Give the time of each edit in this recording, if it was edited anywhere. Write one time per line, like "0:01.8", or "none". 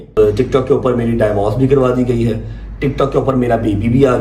none

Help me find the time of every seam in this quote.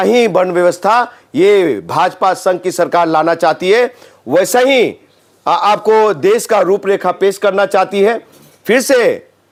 none

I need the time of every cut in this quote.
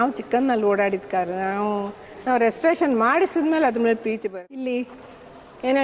0:04.2

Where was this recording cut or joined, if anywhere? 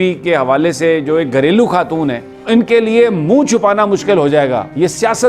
0:02.3

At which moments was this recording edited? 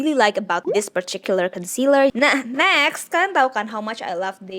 0:02.1

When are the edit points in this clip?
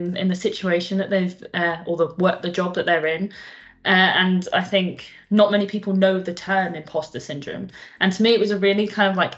none

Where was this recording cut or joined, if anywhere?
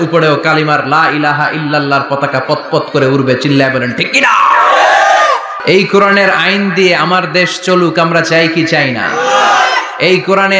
0:05.6

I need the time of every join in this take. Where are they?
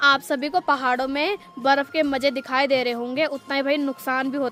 none

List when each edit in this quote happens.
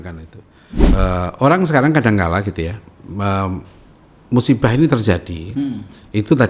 0:00.9

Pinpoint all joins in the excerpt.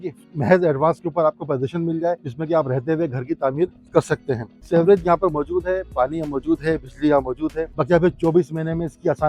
0:02.3
0:04.5
0:07.7

